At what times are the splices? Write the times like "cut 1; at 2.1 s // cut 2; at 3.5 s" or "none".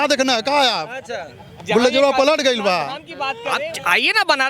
cut 1; at 3.5 s